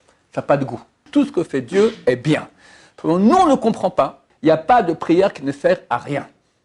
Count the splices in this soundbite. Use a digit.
2